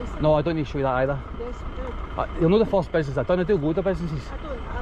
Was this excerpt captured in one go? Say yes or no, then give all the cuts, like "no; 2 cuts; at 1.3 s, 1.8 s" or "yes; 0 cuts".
yes; 0 cuts